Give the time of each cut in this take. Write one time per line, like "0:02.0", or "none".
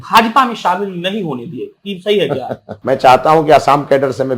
0:02.7